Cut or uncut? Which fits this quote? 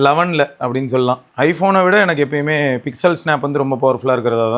cut